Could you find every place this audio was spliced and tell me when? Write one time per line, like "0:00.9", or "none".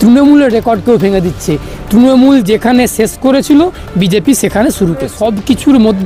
0:05.1